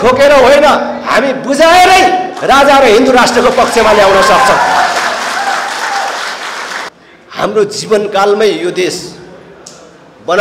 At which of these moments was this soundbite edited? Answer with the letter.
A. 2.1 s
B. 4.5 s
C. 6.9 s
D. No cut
C